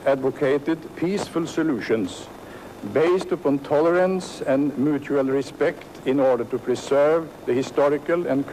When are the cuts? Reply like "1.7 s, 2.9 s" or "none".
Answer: none

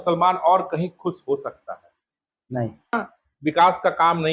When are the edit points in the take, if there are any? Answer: 2.9 s

